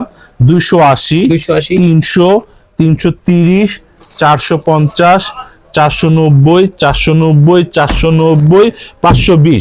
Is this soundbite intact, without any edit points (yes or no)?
yes